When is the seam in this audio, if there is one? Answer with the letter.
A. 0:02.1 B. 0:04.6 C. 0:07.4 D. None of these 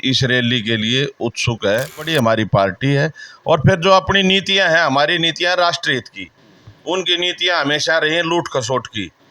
A